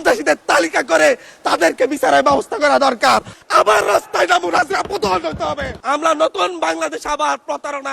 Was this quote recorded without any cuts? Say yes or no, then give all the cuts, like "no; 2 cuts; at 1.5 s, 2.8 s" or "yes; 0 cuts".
no; 2 cuts; at 3.4 s, 5.8 s